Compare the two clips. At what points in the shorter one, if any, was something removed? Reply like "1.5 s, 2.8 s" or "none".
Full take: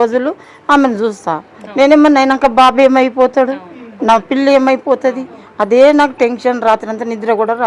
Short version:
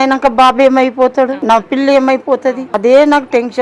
1.4 s, 2.7 s

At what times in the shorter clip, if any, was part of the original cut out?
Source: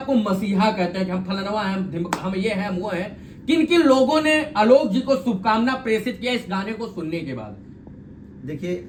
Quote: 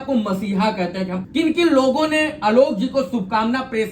1.2 s

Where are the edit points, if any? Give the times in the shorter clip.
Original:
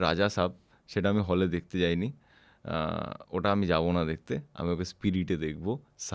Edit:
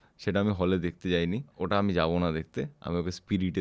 1.5 s

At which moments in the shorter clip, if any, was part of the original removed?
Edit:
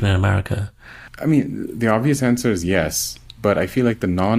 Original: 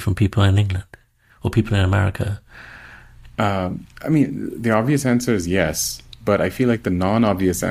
1.0 s

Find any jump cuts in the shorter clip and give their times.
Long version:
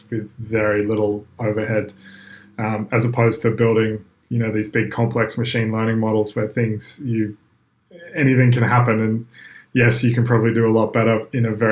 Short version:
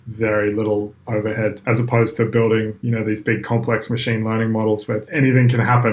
1.6 s, 2.8 s, 5.0 s

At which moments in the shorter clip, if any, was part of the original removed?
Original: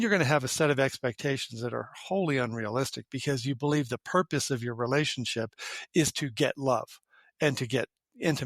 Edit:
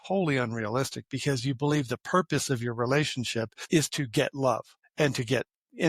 3.6 s, 4.8 s

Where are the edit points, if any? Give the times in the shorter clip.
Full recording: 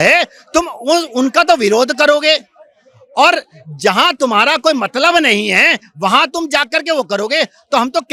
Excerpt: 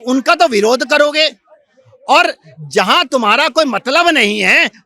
none

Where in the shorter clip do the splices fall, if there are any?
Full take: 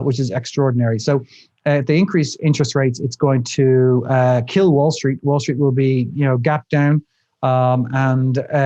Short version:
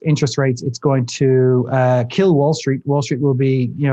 none

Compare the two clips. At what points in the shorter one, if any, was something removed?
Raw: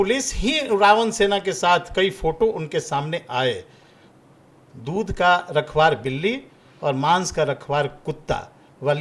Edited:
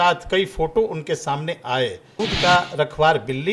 2.2 s

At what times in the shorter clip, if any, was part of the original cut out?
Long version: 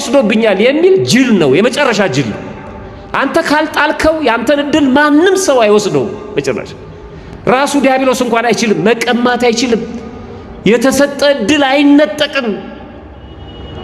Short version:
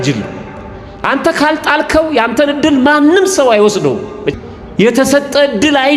4.3 s

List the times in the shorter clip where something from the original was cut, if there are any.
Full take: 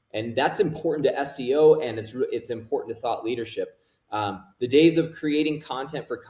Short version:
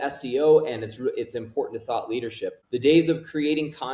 2.6 s

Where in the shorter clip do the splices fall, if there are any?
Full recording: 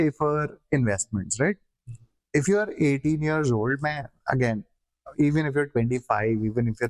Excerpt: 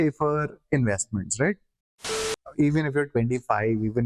2.1 s

